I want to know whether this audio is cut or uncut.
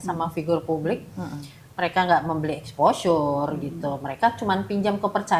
uncut